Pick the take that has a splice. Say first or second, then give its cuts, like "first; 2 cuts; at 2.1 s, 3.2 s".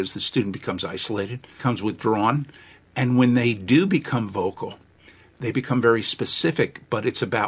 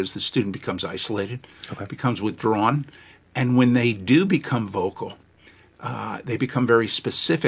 first; 2 cuts; at 1.5 s, 5.3 s